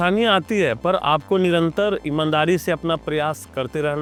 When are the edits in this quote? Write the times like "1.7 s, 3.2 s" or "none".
none